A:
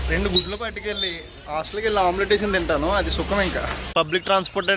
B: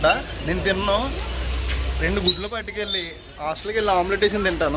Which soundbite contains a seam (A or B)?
A